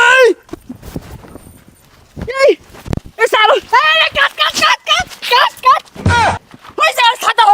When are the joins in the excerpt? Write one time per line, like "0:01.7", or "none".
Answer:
none